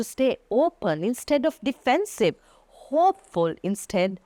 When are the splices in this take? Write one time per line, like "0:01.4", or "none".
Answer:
none